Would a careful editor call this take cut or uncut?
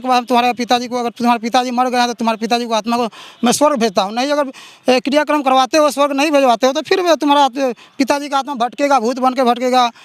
uncut